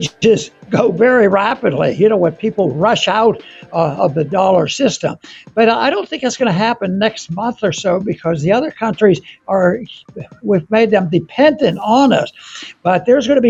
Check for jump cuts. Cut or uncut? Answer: uncut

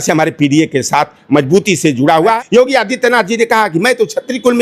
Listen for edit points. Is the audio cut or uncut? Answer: cut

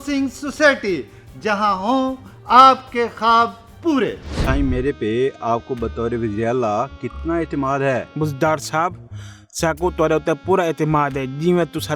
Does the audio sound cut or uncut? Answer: cut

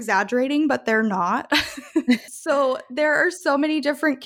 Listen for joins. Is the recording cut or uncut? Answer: cut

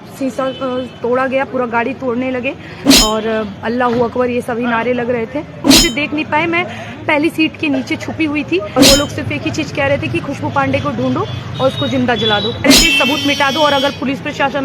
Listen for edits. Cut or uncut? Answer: cut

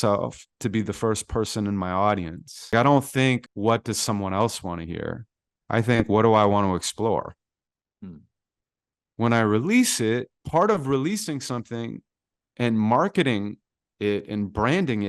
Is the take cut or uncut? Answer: cut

